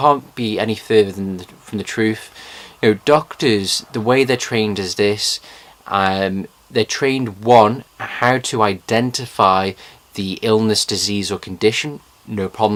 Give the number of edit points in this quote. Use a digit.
0